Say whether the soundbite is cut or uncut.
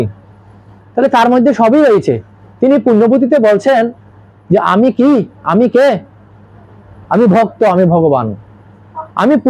uncut